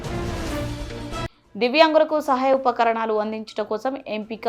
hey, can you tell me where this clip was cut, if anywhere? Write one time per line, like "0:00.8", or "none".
0:01.3

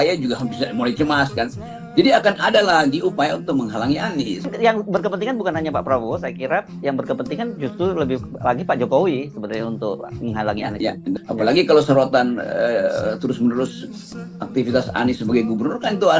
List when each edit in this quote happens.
0:04.5
0:11.2

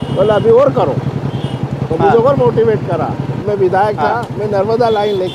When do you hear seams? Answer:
0:03.4

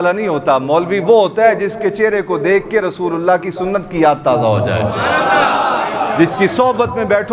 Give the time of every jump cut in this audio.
none

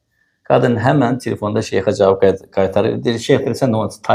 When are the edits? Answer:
none

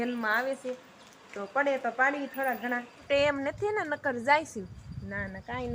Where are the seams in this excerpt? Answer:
0:02.9

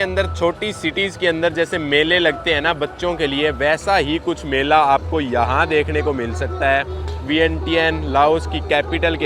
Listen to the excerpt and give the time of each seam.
none

